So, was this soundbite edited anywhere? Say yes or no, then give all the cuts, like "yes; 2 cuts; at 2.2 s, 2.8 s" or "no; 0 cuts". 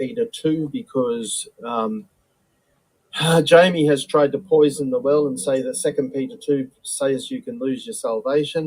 yes; 1 cut; at 1.7 s